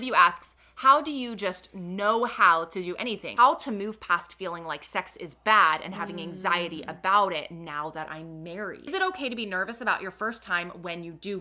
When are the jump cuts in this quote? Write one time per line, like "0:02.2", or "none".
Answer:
0:03.2
0:08.9

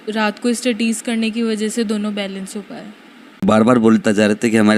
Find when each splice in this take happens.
0:03.4

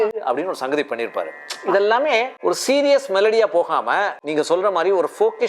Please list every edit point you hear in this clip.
0:02.3
0:04.2

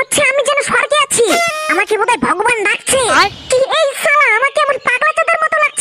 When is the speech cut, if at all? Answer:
none

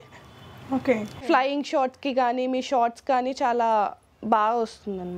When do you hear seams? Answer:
0:01.1

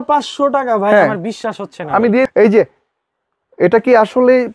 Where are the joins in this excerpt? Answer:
0:02.3

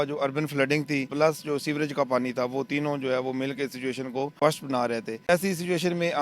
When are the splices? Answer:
0:01.1
0:04.3
0:05.3

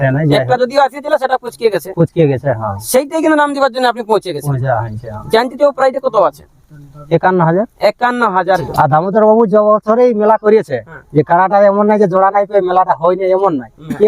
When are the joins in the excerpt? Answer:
0:08.7

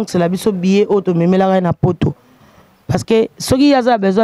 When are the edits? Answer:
none

